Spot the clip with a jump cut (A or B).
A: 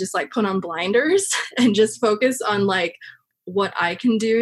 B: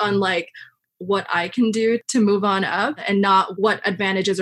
B